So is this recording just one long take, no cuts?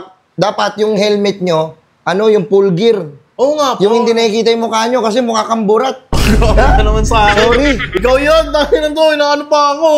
yes; 0 cuts

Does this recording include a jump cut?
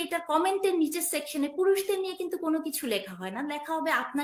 no; 0 cuts

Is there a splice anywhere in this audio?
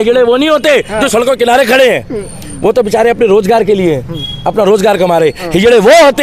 no; 0 cuts

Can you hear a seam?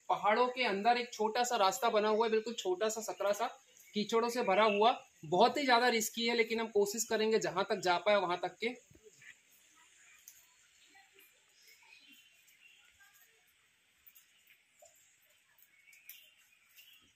no; 0 cuts

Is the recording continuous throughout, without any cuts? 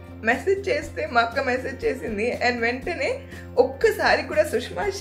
yes; 0 cuts

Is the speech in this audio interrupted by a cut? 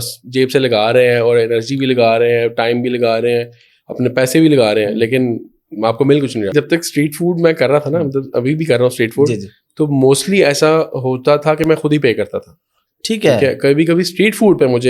yes; 1 cut; at 6.5 s

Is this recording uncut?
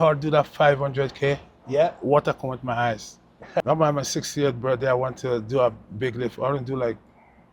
no; 1 cut; at 3.6 s

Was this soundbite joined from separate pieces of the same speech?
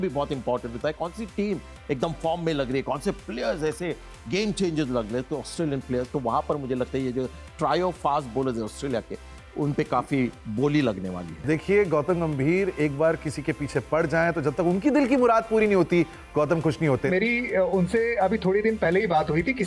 yes; 2 cuts; at 11.3 s, 17.1 s

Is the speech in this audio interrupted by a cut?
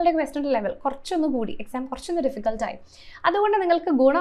no; 0 cuts

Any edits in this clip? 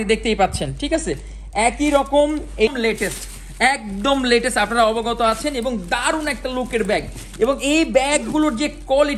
yes; 1 cut; at 2.7 s

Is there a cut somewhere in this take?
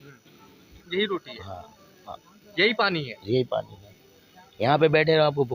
no; 0 cuts

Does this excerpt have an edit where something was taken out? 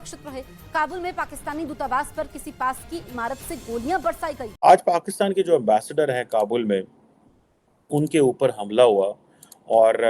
yes; 1 cut; at 4.5 s

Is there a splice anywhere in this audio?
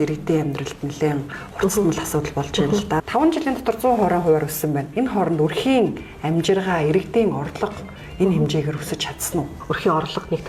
yes; 2 cuts; at 3.1 s, 9.6 s

